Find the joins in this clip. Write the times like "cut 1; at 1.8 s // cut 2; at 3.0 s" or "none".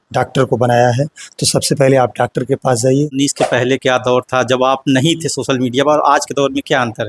cut 1; at 3.1 s